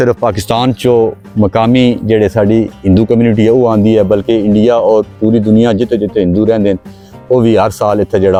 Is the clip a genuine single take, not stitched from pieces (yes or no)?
yes